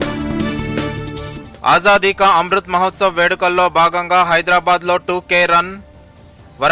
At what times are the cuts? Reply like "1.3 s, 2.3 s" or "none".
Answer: 1.0 s